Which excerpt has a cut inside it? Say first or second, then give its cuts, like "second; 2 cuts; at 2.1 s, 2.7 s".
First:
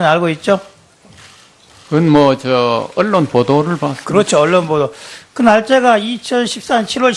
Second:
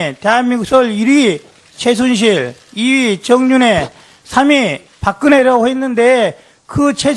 second; 1 cut; at 3.0 s